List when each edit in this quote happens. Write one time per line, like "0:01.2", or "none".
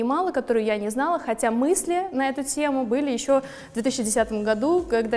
none